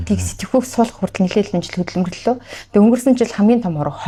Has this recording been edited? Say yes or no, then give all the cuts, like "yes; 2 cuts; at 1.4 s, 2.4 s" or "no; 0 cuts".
no; 0 cuts